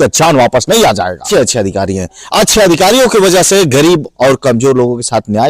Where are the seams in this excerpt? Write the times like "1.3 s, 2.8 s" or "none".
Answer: 1.2 s